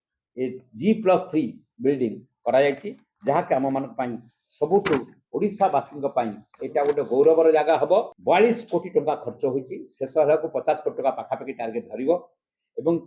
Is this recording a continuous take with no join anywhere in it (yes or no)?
no